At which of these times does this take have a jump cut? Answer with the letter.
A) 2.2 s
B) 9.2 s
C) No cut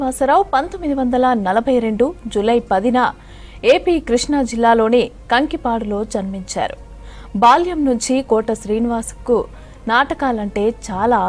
C